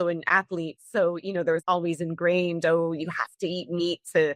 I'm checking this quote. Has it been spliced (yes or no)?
yes